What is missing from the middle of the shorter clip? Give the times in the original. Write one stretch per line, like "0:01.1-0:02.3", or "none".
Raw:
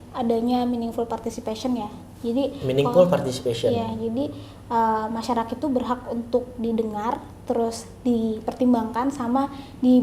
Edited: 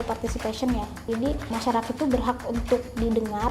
0:02.4-0:05.0